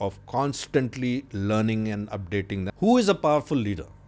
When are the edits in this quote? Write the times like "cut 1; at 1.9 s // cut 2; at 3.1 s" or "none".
cut 1; at 2.7 s